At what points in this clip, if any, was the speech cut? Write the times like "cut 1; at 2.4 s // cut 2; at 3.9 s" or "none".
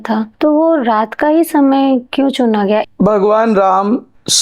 cut 1; at 2.8 s